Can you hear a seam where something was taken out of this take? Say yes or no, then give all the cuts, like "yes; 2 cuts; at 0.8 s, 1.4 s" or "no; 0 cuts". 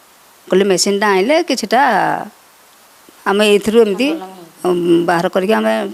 no; 0 cuts